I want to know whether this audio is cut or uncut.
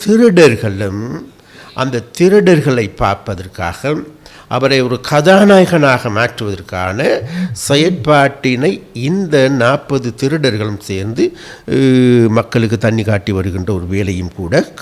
uncut